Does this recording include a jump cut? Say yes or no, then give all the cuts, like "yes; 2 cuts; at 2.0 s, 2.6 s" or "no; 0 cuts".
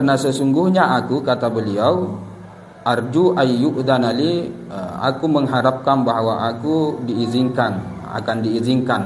no; 0 cuts